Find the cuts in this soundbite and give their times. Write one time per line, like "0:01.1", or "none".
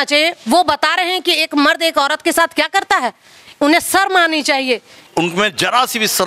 0:04.9